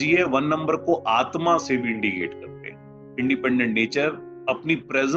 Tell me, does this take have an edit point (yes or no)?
no